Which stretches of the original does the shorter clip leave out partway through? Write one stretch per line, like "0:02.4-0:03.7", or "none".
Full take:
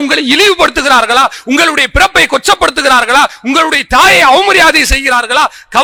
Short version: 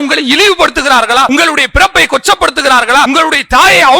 0:01.3-0:01.5
0:03.3-0:03.5